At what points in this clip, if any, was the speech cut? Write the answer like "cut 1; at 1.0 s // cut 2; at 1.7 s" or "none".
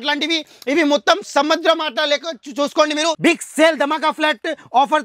cut 1; at 3.2 s